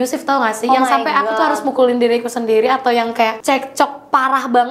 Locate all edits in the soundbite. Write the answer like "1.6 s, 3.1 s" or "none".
3.4 s

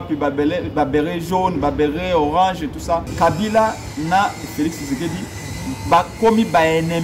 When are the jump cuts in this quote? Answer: 3.1 s

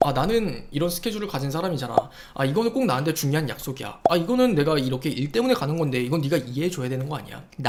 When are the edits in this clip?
none

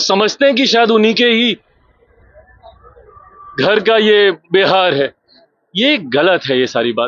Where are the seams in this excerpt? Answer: none

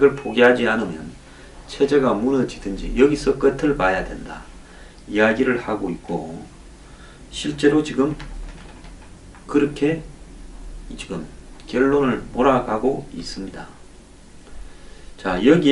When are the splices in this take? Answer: none

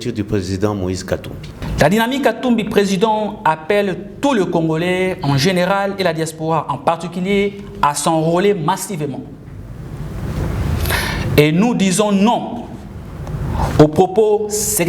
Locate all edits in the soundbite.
1.6 s

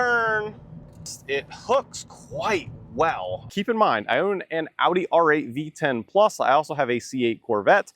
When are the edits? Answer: 1.2 s, 3.5 s

